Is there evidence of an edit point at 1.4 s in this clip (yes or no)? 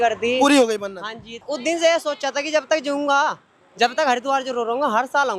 yes